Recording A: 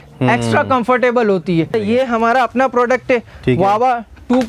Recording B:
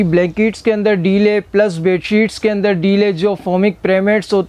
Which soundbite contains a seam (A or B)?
A